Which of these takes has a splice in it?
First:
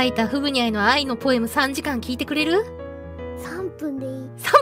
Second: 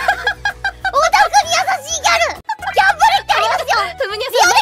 second; 1 cut; at 2.4 s

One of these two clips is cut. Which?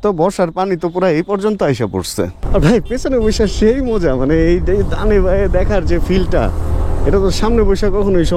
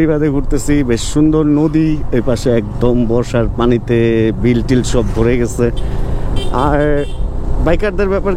first; 1 cut; at 2.4 s

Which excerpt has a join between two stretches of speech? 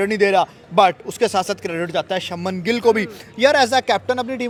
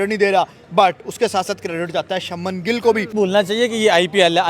second; 1 cut; at 3.1 s

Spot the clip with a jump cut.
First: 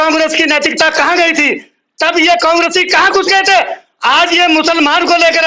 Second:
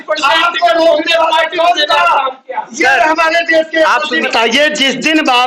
second; 1 cut; at 4.3 s

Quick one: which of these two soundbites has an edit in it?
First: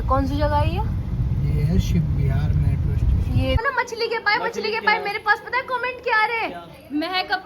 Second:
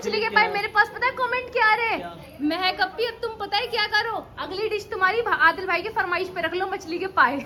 first; 1 cut; at 3.6 s

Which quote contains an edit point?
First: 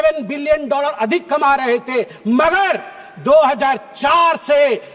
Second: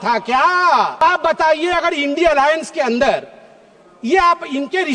second; 1 cut; at 1.0 s

